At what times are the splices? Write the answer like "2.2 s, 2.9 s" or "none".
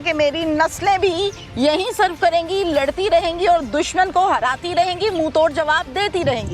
none